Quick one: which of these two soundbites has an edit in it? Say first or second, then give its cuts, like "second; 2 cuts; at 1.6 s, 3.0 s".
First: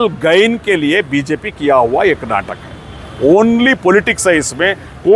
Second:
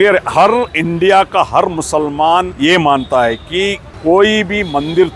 second; 2 cuts; at 2.5 s, 3.9 s